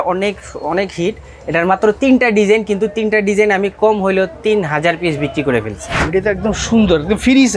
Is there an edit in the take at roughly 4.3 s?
no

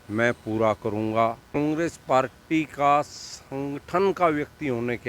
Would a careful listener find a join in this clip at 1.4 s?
yes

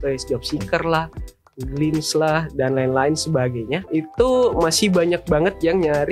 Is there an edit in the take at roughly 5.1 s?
no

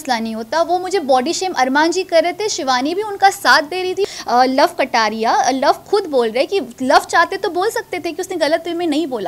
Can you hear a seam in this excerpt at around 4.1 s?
yes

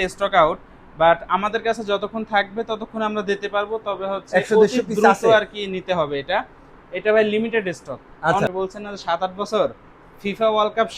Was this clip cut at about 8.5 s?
yes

